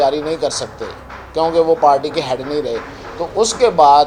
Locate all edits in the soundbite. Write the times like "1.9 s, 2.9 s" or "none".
none